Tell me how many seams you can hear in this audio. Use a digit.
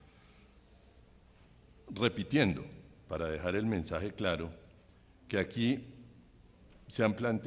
1